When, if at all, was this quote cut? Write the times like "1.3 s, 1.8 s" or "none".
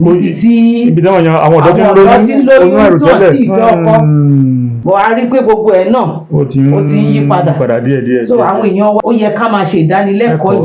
4.7 s, 9.0 s